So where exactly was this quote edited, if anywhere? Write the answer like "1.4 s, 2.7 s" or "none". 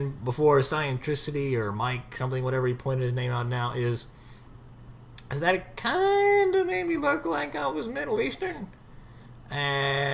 8.0 s